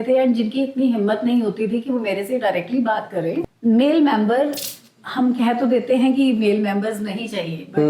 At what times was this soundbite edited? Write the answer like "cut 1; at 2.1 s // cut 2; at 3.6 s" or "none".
cut 1; at 3.4 s